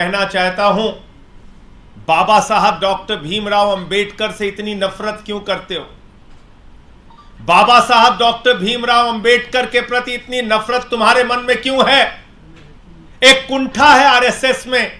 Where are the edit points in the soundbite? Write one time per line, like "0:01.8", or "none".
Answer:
none